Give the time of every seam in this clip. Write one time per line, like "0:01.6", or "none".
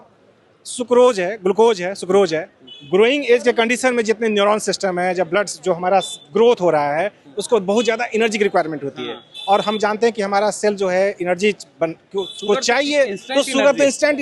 none